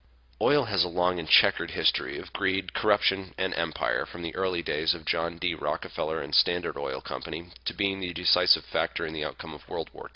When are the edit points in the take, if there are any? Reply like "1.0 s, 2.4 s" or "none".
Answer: 8.3 s